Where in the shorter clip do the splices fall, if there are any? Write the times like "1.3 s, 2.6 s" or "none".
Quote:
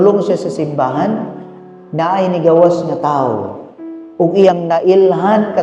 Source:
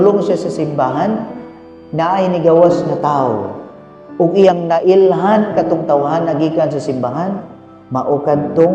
none